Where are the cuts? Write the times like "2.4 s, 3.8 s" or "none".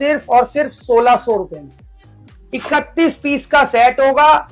none